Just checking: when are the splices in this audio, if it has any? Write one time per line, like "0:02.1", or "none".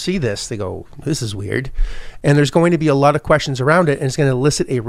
0:01.0